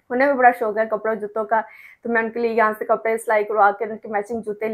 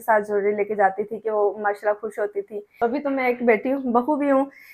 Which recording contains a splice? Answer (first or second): second